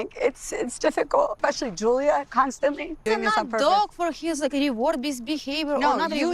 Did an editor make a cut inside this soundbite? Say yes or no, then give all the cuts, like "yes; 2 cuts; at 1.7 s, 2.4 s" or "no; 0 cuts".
yes; 2 cuts; at 1.4 s, 3.0 s